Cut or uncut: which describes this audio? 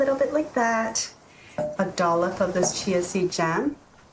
cut